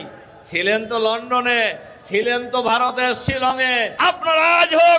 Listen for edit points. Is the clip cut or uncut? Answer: cut